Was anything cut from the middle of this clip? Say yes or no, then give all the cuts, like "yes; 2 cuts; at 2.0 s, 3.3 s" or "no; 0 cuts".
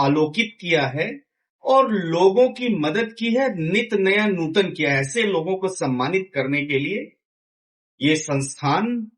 no; 0 cuts